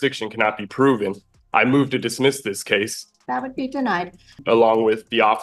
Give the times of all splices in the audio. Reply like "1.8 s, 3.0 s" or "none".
3.0 s, 4.4 s